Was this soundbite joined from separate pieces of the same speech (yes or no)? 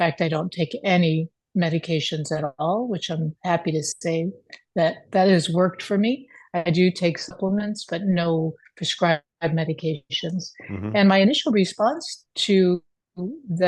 no